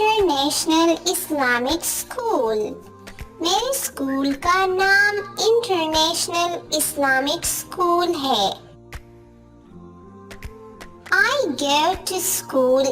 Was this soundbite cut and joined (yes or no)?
no